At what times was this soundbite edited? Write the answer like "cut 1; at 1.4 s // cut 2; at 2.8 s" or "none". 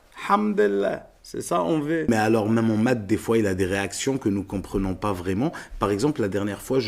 cut 1; at 2.1 s